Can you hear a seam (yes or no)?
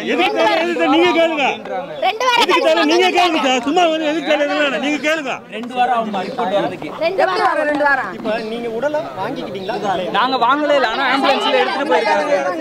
no